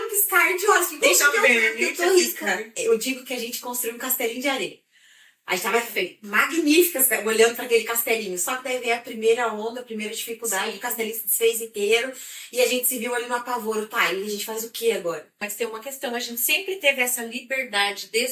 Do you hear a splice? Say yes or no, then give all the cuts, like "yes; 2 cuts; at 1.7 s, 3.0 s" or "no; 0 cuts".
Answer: yes; 3 cuts; at 0.9 s, 2.7 s, 15.4 s